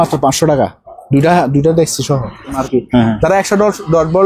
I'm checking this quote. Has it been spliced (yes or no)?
yes